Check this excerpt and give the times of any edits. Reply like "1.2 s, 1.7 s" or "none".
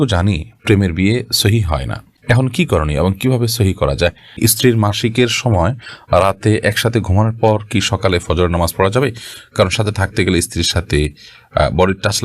4.3 s